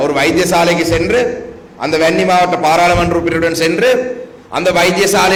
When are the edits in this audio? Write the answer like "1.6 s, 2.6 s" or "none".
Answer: none